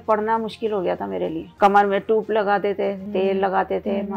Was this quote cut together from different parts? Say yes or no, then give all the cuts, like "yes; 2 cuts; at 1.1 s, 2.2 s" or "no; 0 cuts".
yes; 2 cuts; at 1.5 s, 3.0 s